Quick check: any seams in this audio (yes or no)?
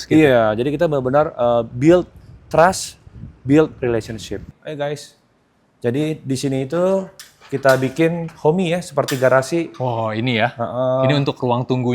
yes